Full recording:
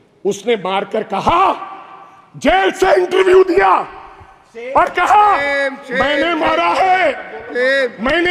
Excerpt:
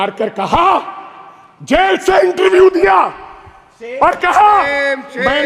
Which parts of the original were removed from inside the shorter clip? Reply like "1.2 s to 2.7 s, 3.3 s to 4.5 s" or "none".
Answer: none